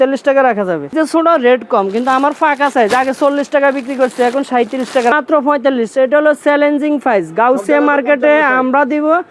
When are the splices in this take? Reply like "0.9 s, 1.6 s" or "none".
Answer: 0.9 s, 5.1 s